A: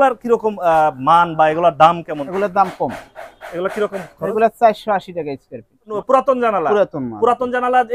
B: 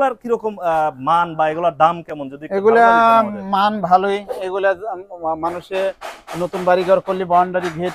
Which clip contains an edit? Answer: A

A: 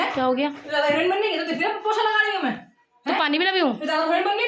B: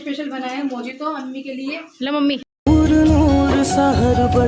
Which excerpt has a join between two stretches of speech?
B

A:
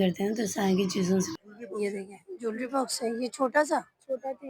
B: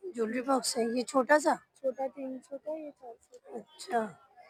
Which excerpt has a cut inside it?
A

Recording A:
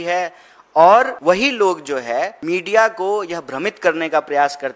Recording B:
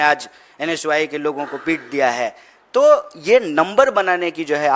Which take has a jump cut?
A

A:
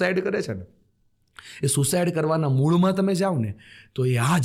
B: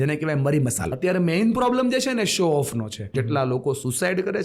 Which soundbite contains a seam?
B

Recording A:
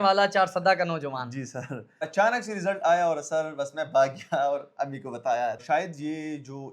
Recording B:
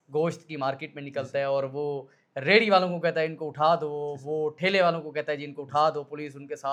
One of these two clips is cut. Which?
A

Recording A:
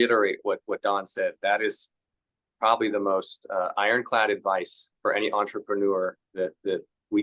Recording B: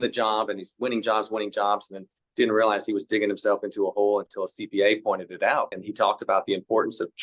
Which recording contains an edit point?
B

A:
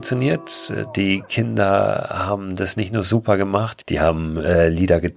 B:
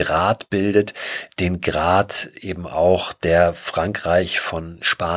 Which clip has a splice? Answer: A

